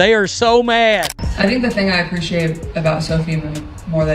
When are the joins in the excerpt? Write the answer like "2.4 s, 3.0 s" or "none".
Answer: 1.2 s